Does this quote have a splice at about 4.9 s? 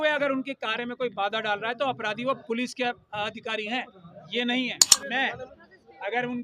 yes; 1 cut; at 4.9 s

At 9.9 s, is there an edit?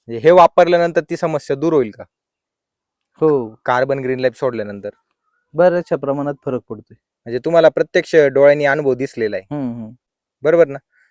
no; 0 cuts

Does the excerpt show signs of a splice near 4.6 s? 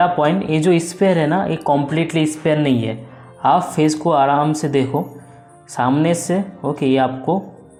no; 0 cuts

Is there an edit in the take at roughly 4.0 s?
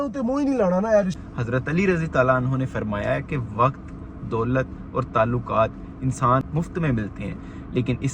no; 2 cuts; at 1.2 s, 6.4 s

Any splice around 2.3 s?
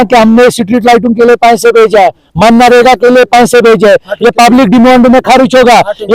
no; 0 cuts

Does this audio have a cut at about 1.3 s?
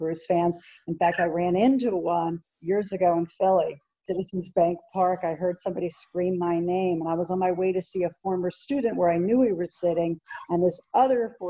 no; 1 cut; at 4.1 s

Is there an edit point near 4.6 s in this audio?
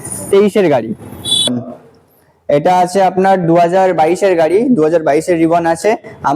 no; 1 cut; at 1.5 s

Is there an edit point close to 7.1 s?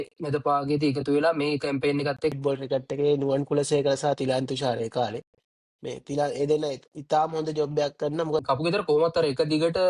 no; 2 cuts; at 2.3 s, 8.4 s

